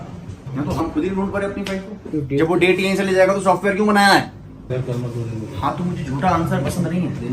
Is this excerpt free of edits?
no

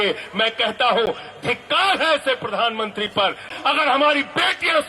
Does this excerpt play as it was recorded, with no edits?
no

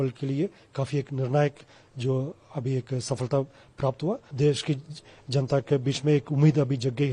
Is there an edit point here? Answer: yes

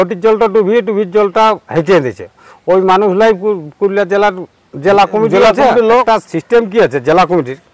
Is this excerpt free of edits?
no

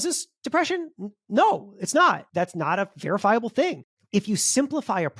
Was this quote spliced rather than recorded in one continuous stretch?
yes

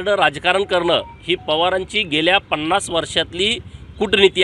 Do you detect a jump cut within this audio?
no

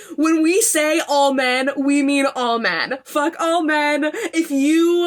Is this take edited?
no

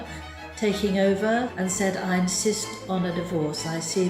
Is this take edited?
yes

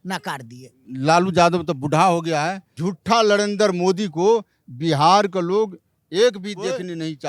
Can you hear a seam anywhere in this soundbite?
yes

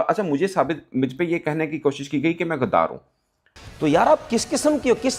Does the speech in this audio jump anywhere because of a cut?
no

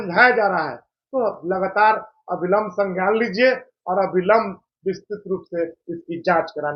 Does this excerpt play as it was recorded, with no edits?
yes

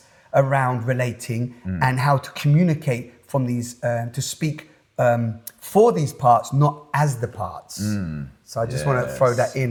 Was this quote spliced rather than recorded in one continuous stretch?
no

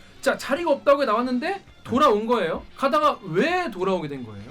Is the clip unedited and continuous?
no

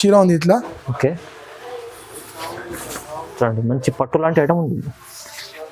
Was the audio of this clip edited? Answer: no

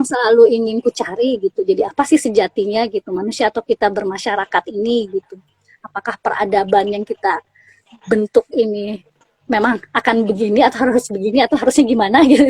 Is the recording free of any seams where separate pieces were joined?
yes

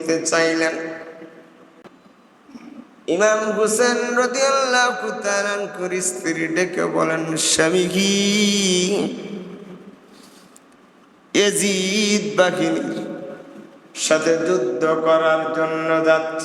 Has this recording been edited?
yes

